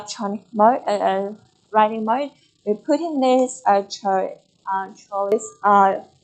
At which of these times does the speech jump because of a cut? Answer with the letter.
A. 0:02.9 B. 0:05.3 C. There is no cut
B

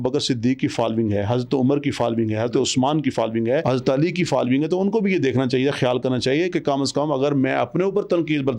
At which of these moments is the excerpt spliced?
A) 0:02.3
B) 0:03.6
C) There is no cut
B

